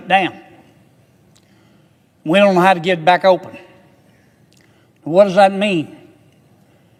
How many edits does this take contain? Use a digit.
0